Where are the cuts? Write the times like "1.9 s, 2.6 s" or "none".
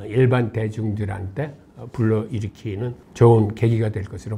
none